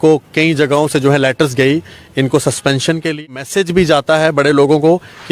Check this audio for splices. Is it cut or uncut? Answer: cut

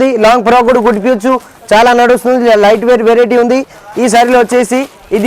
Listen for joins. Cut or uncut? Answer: uncut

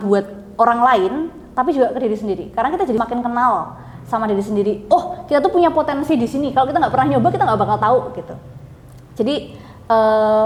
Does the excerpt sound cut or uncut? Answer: uncut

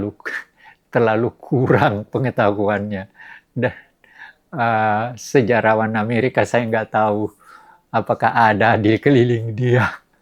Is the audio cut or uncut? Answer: uncut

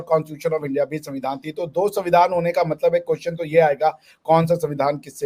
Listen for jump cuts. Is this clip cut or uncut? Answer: uncut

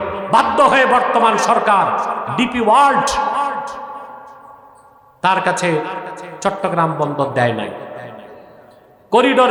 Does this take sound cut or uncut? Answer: uncut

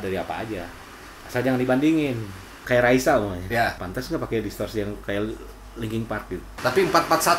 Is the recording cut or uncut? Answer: cut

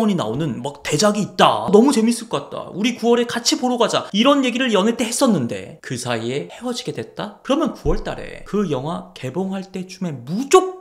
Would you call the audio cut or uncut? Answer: uncut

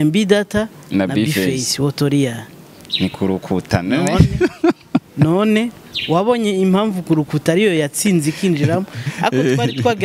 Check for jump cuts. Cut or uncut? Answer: uncut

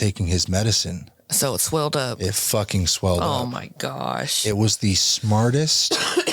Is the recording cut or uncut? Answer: uncut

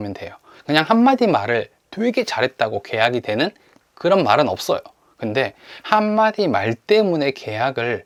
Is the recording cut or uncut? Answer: uncut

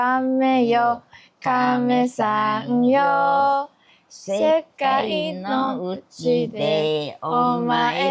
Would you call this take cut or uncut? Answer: uncut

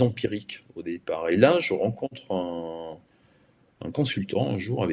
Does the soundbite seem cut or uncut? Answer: uncut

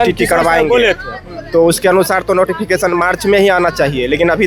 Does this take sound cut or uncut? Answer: uncut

